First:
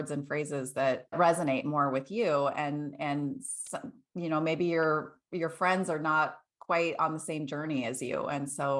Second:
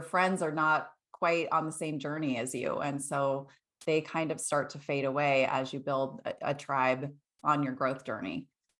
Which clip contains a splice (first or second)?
first